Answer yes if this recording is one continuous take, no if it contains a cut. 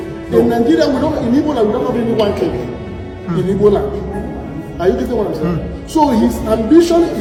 yes